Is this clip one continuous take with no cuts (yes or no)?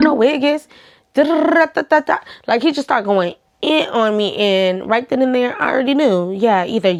yes